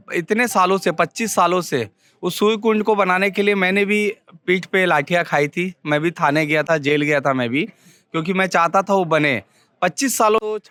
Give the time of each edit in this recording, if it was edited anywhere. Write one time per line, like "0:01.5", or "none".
none